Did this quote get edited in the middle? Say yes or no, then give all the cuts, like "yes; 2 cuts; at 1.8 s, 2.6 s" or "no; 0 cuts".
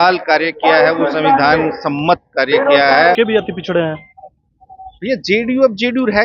yes; 1 cut; at 3.2 s